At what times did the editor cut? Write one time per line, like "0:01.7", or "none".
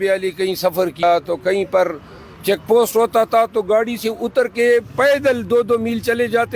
0:01.0